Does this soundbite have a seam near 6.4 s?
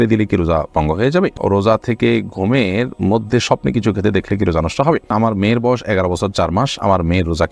no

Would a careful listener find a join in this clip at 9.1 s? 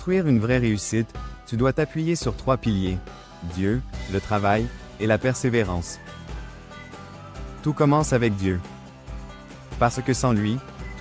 no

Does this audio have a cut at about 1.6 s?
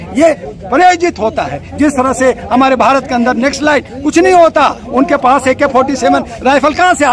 no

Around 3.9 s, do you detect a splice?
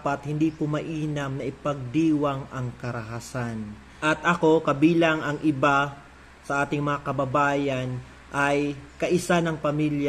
yes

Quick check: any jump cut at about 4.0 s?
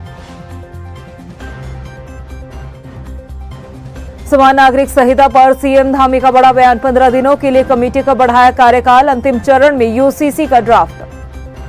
no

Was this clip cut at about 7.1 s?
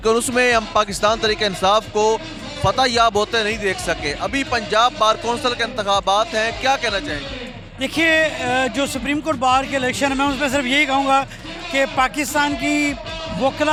no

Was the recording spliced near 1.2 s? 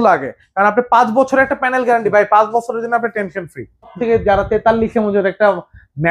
no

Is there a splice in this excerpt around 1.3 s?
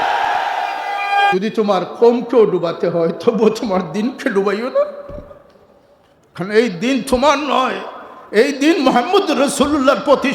yes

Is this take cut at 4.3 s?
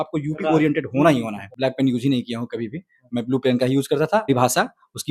yes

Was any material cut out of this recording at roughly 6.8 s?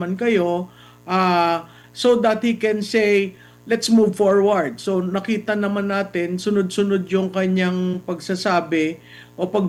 no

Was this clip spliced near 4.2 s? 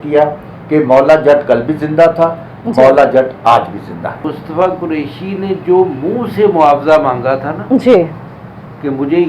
yes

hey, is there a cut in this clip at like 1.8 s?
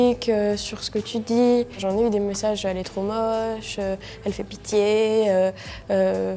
yes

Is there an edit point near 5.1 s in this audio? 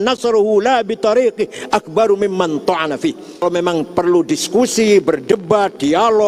no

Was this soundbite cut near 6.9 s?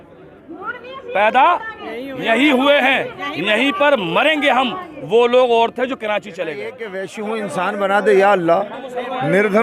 yes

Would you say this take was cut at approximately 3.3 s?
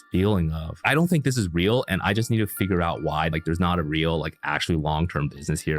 yes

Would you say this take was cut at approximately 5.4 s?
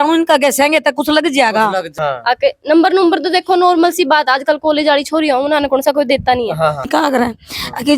no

